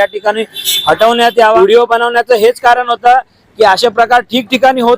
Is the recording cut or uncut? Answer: cut